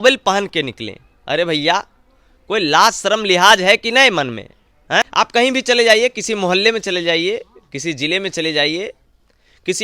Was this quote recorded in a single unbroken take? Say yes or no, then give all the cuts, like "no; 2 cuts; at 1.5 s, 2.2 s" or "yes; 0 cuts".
no; 1 cut; at 5.1 s